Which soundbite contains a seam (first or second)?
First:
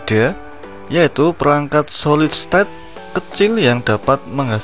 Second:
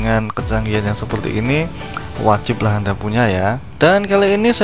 second